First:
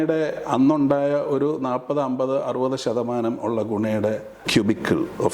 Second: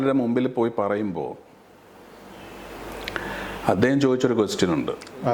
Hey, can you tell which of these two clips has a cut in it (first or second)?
first